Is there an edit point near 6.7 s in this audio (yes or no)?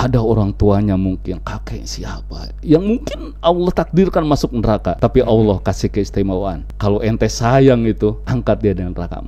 yes